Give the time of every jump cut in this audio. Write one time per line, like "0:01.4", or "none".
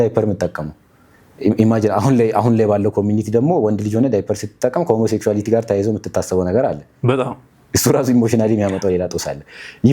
none